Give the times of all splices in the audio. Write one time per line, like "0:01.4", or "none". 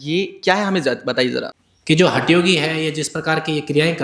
0:01.6

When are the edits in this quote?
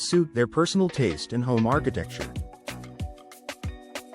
0:02.1

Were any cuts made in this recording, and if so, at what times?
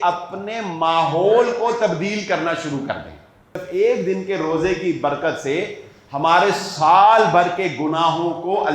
0:03.6

